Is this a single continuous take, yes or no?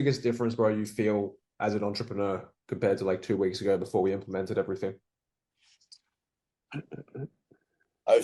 yes